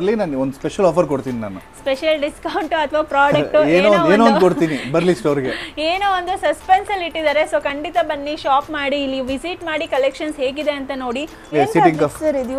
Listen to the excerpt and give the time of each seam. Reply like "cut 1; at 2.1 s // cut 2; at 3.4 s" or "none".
cut 1; at 11.5 s